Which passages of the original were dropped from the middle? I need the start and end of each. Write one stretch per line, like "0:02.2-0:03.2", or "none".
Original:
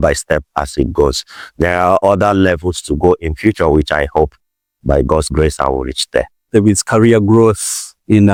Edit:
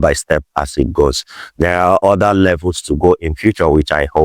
none

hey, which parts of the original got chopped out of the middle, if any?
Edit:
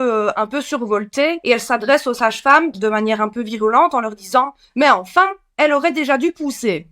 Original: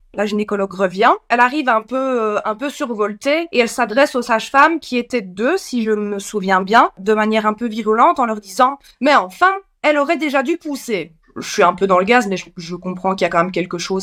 0:04.8-0:07.0

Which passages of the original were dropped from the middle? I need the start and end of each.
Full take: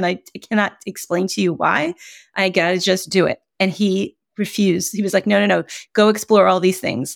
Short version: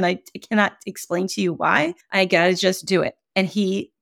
0:02.0-0:02.3

